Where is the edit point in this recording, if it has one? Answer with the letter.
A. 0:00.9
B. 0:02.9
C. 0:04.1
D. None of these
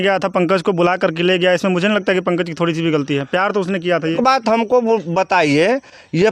C